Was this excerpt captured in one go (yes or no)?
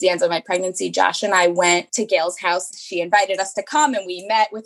no